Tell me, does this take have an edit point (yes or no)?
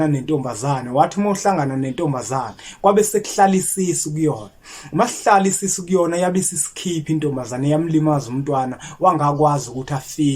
no